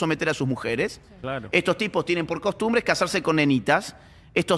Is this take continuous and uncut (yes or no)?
yes